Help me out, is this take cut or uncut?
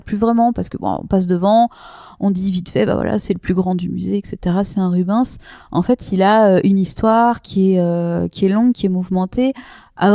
uncut